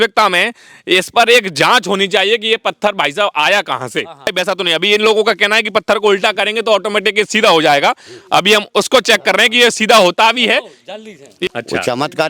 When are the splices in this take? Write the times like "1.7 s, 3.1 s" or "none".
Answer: 4.3 s, 11.3 s